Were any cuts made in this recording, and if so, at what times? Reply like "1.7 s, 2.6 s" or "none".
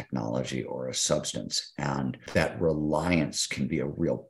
2.2 s